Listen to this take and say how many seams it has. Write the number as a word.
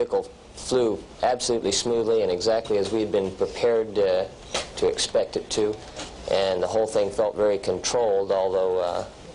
one